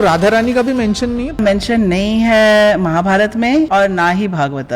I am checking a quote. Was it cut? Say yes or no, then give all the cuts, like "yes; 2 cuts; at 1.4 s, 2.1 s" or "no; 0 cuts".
yes; 2 cuts; at 1.4 s, 3.7 s